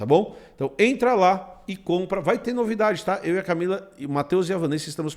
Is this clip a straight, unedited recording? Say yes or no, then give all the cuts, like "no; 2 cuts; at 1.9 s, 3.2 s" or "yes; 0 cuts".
yes; 0 cuts